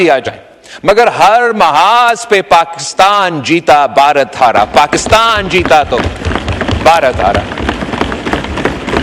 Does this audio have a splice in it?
no; 0 cuts

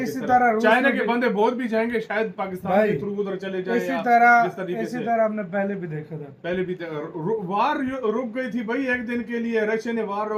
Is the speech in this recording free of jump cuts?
yes; 0 cuts

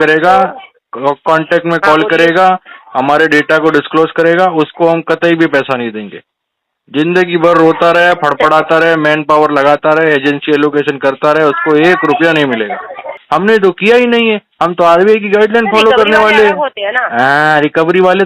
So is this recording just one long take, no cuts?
no; 1 cut; at 13.2 s

